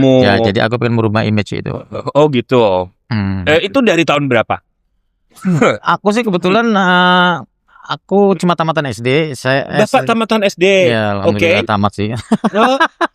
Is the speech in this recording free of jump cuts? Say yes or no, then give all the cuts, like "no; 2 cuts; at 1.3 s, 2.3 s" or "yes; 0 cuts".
yes; 0 cuts